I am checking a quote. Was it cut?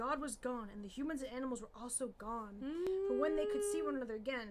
no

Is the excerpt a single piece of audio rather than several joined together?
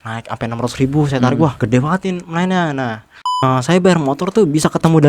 no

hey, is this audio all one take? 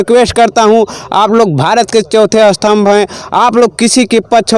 yes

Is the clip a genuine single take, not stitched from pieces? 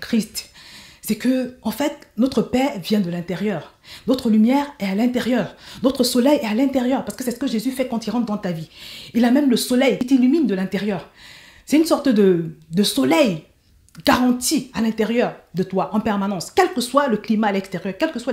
yes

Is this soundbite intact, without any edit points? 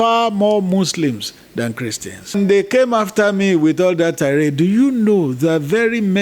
no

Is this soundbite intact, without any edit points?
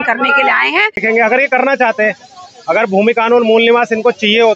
no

